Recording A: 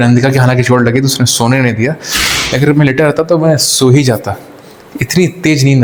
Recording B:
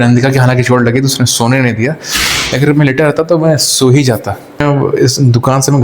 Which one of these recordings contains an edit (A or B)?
B